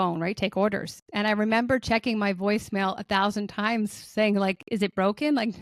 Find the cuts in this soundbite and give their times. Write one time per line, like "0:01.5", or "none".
none